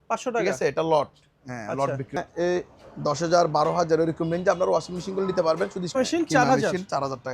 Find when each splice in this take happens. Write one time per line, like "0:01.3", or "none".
0:02.2
0:05.8